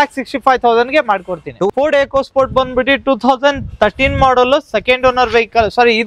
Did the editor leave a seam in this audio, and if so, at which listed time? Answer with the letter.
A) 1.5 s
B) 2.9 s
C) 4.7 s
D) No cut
A